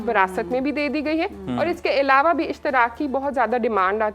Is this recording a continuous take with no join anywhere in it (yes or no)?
yes